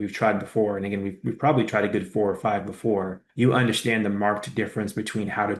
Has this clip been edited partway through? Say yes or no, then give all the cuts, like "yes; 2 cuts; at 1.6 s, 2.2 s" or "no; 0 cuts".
no; 0 cuts